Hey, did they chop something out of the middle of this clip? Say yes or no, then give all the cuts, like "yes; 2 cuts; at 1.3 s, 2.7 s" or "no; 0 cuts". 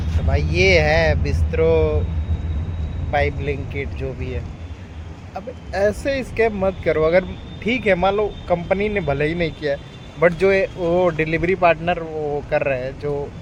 no; 0 cuts